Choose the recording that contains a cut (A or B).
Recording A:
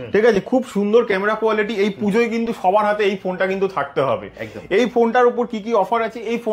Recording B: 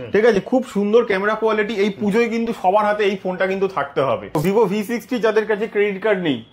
B